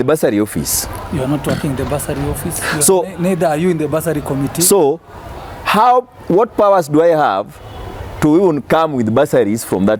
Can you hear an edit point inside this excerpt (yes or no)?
no